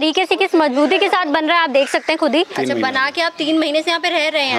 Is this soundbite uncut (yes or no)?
no